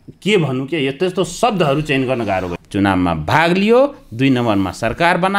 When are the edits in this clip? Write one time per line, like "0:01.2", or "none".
0:02.5